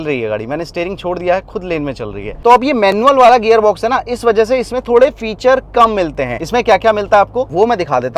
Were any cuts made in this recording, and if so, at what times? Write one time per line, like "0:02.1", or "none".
none